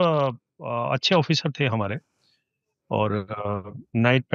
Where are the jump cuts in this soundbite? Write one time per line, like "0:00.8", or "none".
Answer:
none